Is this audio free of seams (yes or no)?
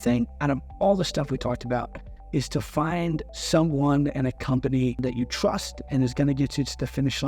no